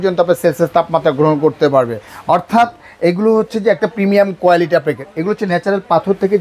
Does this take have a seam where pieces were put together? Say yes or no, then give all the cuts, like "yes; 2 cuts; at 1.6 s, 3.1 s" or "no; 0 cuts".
no; 0 cuts